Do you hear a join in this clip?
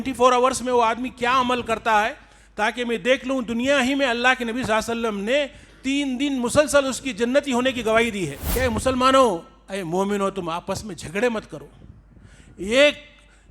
yes; 1 cut; at 8.4 s

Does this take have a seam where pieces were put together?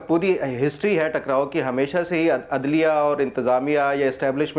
no; 0 cuts

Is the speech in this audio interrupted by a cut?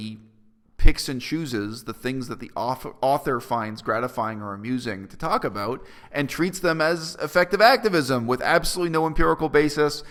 no; 0 cuts

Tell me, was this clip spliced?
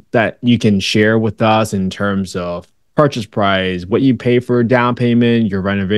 no; 0 cuts

